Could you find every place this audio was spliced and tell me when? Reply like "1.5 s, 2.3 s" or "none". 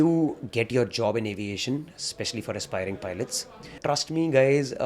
3.8 s